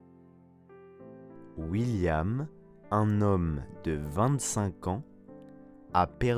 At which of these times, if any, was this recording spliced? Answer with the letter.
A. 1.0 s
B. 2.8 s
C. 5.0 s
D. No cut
A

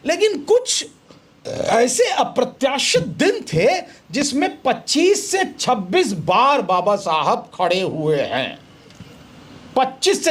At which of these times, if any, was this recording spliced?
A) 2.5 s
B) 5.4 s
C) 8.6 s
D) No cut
D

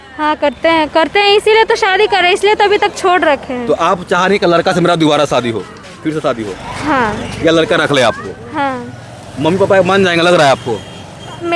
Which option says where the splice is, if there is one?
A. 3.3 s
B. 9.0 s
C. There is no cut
C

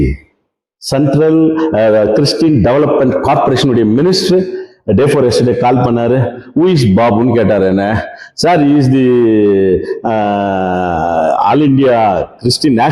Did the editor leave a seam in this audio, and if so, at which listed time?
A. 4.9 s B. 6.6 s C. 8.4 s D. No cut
D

